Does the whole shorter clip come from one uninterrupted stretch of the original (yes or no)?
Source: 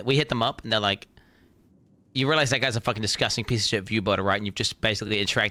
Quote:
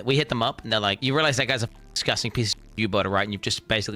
no